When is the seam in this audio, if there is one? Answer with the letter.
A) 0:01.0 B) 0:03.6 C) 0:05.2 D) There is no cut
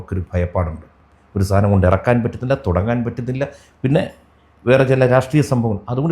D